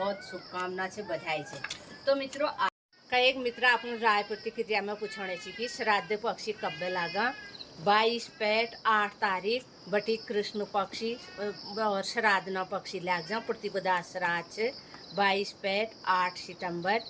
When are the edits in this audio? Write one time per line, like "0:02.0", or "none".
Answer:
0:02.7